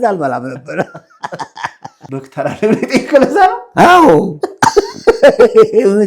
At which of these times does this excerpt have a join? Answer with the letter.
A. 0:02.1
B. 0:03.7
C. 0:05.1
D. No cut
A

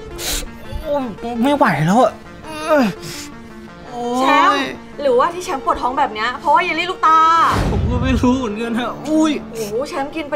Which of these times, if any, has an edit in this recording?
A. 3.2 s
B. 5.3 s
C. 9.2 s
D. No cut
D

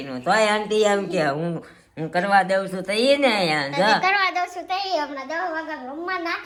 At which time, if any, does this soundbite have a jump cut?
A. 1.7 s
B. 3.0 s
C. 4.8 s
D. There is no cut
D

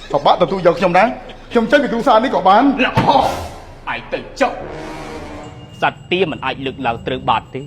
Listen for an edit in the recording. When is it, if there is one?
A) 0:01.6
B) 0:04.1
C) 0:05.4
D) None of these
C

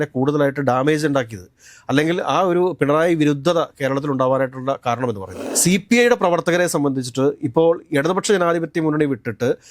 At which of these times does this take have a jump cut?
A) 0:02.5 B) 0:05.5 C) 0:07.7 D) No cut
B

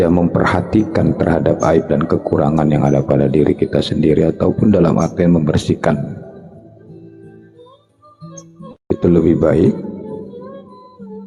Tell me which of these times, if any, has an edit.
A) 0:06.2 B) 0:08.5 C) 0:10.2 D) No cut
D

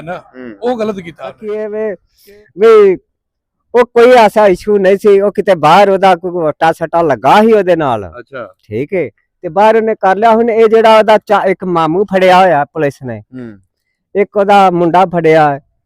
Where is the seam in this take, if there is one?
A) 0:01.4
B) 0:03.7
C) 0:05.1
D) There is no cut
A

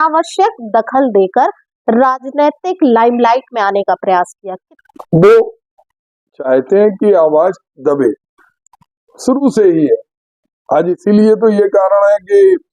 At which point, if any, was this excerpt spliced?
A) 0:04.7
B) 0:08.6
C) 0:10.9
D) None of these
A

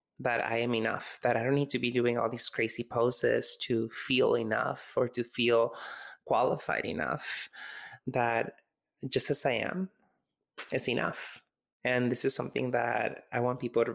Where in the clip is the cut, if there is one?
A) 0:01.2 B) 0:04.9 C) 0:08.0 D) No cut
C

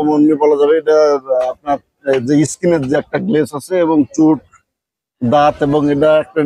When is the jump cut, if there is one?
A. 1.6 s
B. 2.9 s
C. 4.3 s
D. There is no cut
D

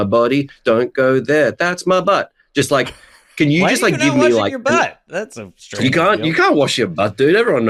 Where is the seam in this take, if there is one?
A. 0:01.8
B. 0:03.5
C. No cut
C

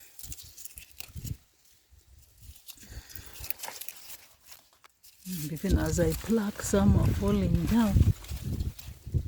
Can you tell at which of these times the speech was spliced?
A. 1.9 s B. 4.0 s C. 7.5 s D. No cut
B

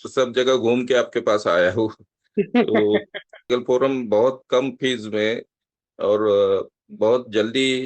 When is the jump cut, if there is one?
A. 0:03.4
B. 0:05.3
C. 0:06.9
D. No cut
A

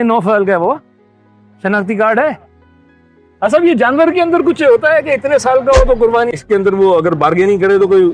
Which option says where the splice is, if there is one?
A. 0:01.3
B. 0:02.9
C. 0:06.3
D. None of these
C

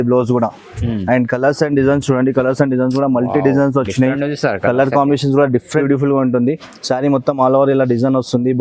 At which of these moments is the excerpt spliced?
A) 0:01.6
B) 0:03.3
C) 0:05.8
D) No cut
C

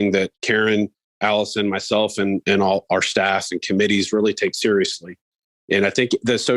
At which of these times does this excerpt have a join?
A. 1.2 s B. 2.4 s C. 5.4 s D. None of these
B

